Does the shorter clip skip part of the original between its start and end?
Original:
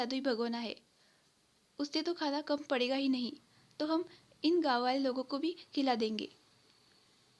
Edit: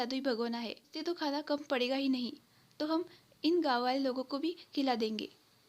yes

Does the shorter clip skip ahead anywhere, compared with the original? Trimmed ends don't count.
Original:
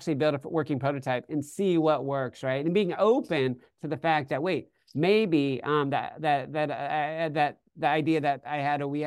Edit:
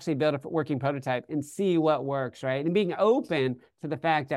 no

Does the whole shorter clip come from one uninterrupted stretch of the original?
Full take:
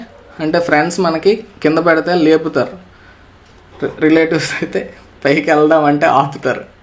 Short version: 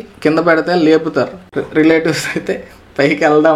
no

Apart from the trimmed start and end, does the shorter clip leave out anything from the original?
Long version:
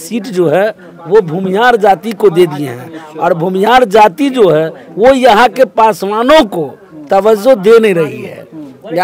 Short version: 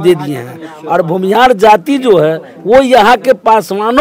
no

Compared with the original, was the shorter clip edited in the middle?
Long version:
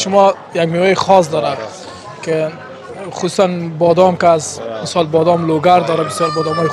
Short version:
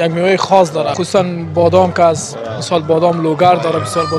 yes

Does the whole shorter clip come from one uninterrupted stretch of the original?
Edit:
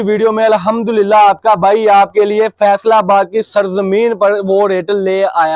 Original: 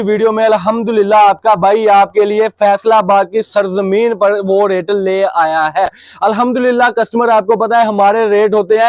yes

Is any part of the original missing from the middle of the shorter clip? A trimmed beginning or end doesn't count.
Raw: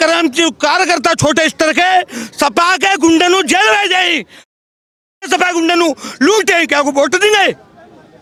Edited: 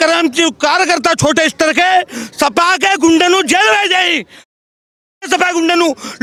no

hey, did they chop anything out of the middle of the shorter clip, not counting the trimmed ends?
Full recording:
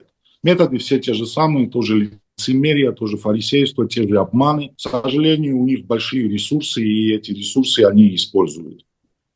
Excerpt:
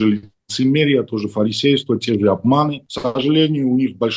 no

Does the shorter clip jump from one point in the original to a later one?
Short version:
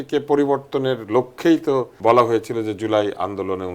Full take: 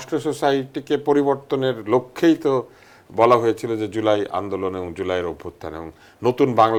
yes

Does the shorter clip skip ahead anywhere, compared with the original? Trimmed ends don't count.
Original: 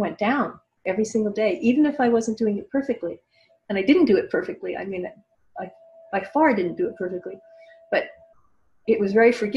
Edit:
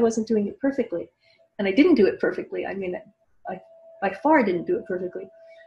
no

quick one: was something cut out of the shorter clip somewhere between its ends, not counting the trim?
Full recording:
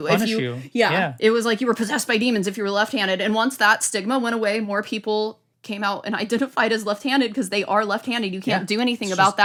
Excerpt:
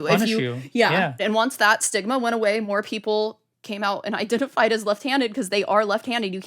yes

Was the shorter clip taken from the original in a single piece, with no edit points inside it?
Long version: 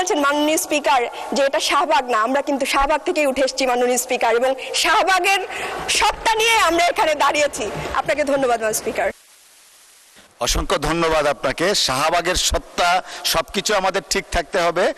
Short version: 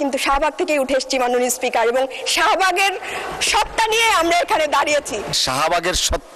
no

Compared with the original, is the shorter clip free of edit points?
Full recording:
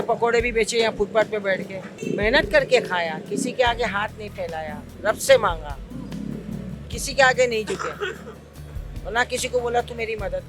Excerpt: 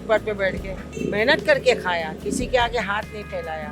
yes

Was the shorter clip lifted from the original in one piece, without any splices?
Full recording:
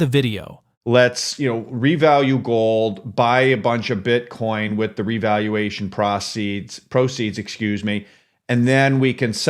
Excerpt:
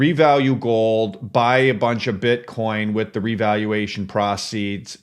yes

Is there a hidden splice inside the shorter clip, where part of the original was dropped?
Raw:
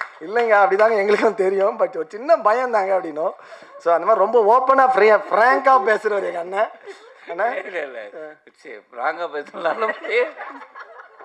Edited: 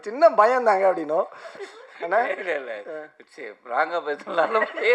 yes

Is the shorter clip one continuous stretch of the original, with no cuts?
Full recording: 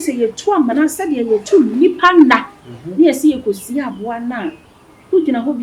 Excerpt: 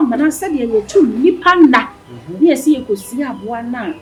yes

